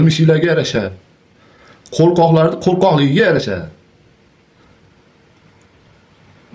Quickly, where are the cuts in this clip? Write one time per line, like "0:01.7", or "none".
none